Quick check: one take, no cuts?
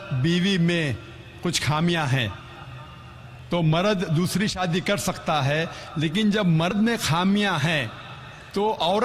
yes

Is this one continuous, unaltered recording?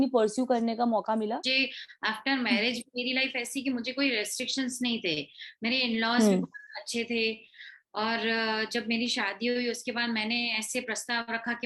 no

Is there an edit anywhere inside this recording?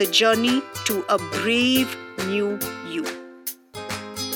yes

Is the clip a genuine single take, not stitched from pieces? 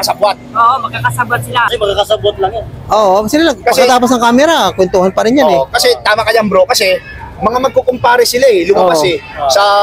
no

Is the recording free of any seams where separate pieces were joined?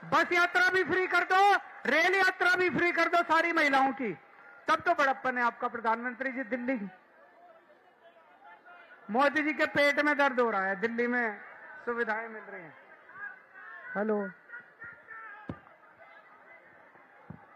yes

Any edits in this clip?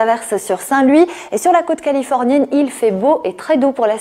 no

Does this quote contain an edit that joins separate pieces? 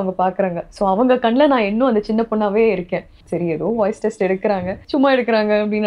yes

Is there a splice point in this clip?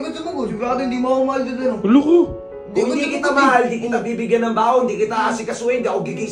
no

